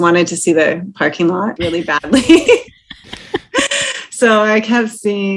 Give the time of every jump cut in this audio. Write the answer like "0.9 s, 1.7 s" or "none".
1.5 s